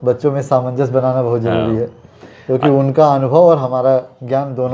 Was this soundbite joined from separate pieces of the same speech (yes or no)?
no